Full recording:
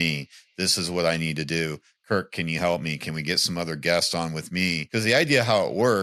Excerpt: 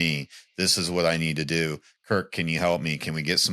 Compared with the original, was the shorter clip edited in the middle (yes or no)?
no